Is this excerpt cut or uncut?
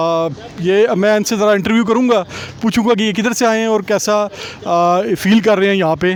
uncut